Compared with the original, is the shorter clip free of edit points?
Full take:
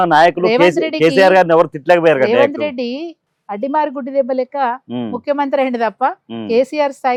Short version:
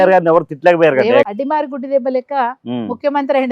no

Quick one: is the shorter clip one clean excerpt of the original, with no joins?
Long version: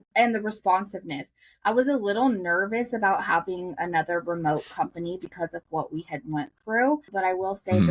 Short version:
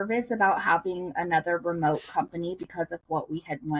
yes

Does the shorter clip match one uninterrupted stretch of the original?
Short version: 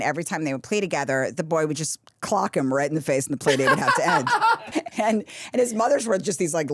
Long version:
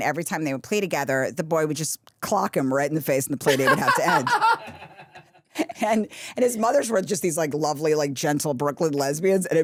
no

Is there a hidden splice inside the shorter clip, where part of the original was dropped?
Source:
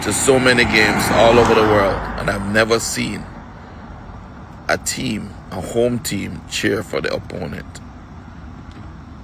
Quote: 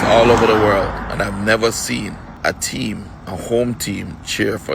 yes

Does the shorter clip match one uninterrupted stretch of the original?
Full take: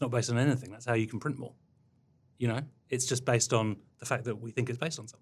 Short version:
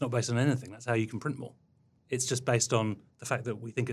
no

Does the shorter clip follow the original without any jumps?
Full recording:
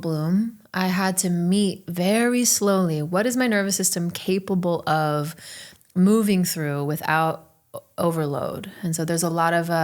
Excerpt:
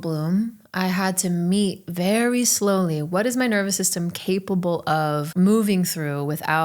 no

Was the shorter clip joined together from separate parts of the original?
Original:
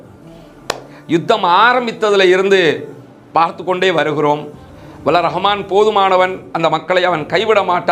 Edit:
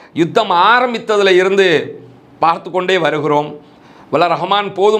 no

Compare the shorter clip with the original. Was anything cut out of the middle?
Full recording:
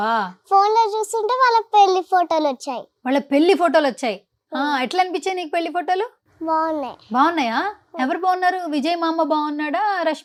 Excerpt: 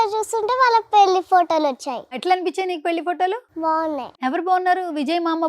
yes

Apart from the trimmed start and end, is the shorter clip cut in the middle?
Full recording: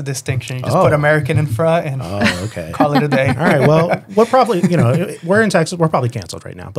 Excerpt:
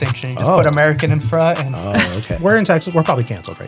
yes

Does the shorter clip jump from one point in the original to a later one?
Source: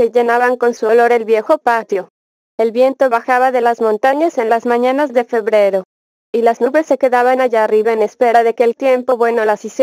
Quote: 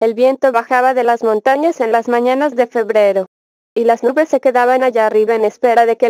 no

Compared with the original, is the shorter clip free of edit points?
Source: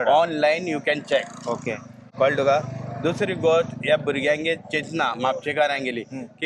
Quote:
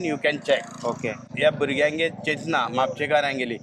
no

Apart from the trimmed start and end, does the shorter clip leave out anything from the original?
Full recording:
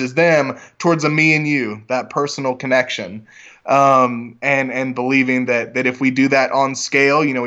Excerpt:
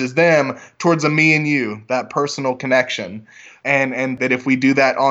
yes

